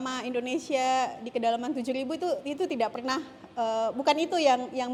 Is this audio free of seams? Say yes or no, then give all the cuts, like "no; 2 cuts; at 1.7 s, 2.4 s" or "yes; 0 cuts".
yes; 0 cuts